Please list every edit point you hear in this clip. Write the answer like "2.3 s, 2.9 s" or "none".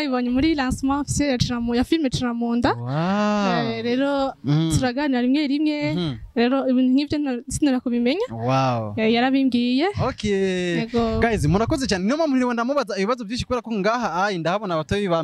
none